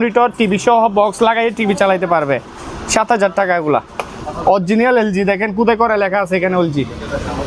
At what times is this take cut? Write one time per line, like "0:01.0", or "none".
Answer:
none